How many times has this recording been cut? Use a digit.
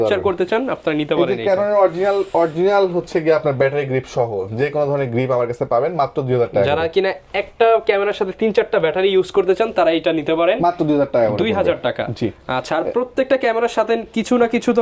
0